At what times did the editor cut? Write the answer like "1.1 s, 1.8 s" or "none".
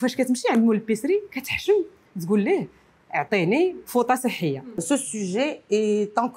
4.8 s